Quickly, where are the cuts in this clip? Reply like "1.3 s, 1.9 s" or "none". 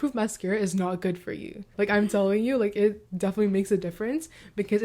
1.7 s

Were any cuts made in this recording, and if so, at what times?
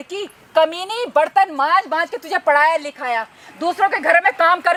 none

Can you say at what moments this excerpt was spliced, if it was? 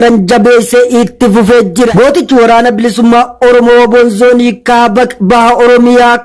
1.9 s

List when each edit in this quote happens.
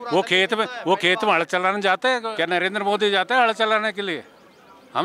2.2 s

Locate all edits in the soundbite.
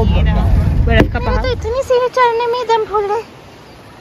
1.3 s

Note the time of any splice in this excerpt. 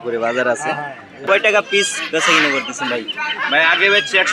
1.1 s

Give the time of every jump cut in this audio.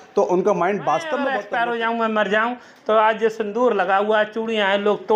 1.3 s

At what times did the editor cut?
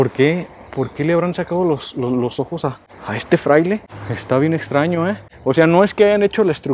none

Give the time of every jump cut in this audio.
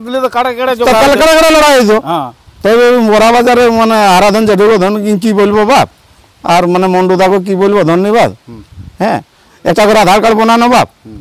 none

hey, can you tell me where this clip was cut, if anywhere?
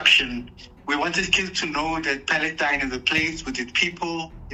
none

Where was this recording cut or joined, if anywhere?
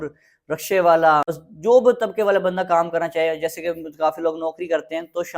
1.3 s

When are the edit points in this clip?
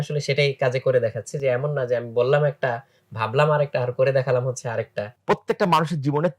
5.1 s

